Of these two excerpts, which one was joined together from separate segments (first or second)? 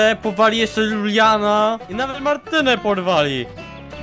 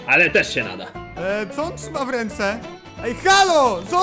second